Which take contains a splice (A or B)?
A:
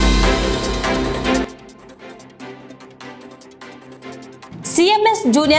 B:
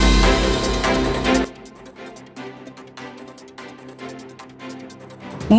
B